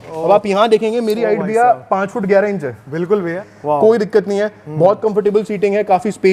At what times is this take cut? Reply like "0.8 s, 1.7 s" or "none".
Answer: 3.5 s